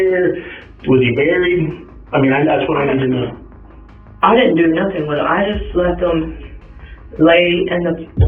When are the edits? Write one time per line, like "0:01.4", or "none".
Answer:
none